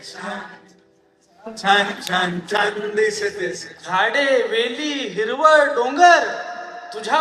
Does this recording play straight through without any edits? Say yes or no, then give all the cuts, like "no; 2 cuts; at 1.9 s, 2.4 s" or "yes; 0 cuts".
no; 1 cut; at 3.7 s